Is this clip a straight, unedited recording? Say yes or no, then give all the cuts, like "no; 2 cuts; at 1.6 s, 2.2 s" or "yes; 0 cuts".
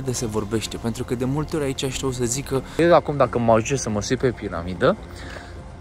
no; 1 cut; at 2.8 s